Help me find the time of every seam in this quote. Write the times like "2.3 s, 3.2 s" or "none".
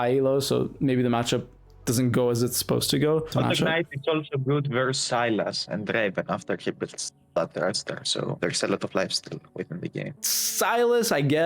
3.6 s